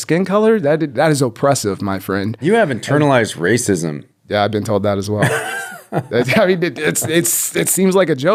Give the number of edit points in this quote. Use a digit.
0